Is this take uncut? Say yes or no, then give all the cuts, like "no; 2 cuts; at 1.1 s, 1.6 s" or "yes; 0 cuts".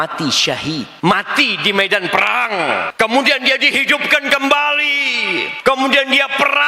no; 3 cuts; at 0.9 s, 2.9 s, 5.5 s